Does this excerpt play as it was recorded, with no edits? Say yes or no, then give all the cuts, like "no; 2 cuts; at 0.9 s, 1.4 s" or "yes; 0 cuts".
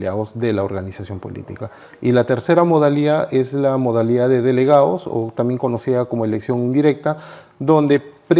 yes; 0 cuts